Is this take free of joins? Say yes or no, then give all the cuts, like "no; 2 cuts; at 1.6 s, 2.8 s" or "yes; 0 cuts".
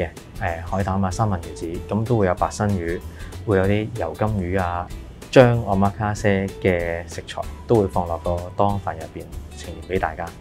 no; 1 cut; at 4.9 s